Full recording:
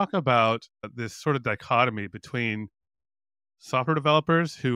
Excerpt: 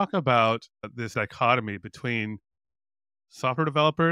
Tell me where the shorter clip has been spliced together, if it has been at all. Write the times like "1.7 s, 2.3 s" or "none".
1.1 s

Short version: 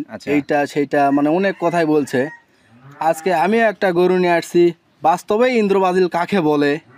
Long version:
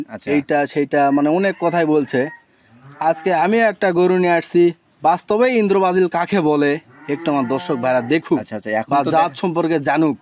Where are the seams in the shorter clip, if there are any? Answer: none

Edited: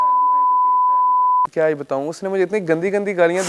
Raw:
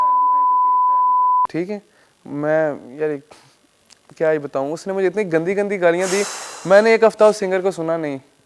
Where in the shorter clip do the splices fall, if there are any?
1.5 s

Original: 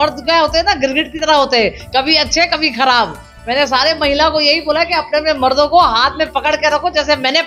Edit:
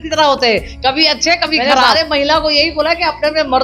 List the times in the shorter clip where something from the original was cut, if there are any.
1.9 s

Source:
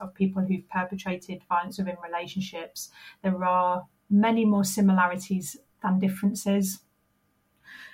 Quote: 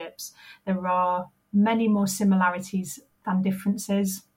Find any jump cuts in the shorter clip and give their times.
none

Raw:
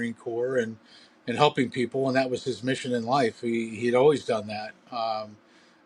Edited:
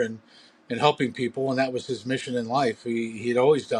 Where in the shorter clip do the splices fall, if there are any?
none

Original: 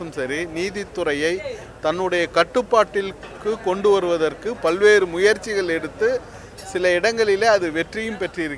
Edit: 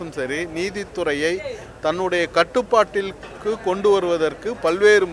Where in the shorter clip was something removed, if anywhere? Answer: none

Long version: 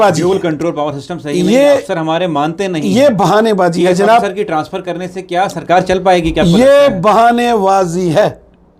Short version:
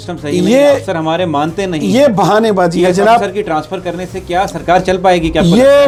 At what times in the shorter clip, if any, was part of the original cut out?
none

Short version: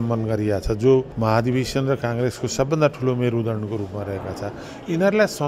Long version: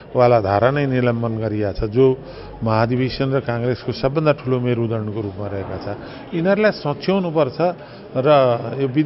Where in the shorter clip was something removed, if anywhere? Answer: 1.1 s

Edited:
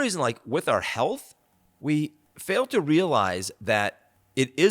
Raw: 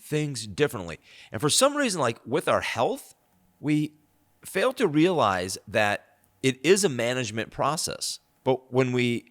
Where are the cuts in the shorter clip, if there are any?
2.3 s

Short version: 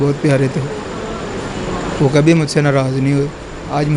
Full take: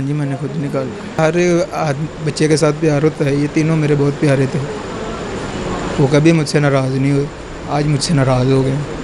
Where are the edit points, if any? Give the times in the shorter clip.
none

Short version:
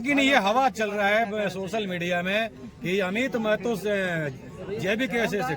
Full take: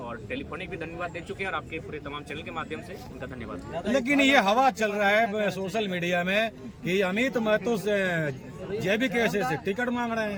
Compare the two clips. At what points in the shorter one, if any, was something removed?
none

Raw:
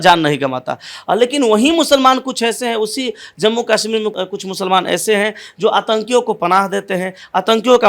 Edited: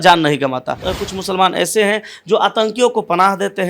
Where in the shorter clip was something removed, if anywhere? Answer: 0.9 s

